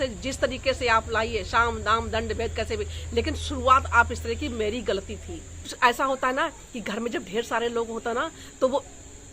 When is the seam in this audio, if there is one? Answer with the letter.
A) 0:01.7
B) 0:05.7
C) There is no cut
B